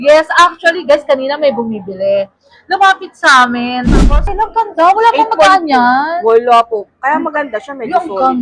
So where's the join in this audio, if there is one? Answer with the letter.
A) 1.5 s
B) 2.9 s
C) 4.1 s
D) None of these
C